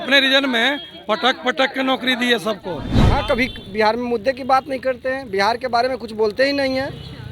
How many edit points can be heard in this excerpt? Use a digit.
1